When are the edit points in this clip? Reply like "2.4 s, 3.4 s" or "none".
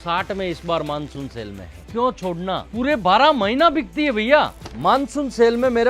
1.8 s, 4.6 s